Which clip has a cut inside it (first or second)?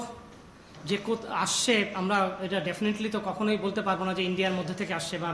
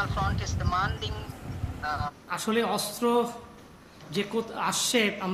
second